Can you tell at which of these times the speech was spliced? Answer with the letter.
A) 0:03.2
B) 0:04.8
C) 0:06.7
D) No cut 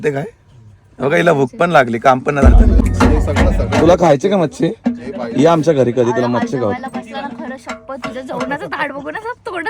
A